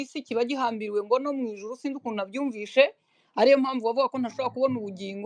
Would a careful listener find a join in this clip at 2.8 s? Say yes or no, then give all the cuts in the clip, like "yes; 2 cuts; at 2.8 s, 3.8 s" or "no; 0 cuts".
no; 0 cuts